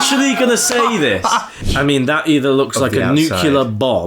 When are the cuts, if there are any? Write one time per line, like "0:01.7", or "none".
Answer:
0:01.6